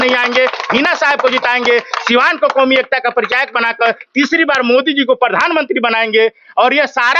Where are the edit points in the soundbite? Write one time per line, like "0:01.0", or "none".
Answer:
none